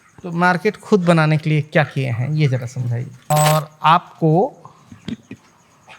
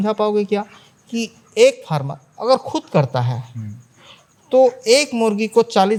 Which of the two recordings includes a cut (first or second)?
first